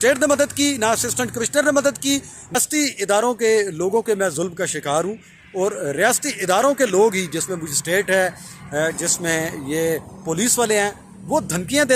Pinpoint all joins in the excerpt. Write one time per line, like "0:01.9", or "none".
0:02.6